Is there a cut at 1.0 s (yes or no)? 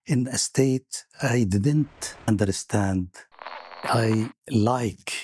no